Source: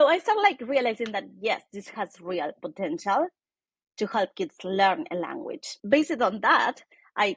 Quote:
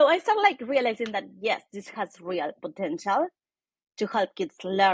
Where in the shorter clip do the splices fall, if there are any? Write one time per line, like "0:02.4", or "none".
none